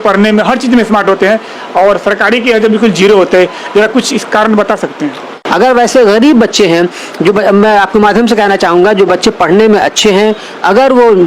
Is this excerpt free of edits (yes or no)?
no